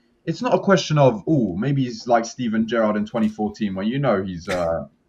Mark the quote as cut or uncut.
uncut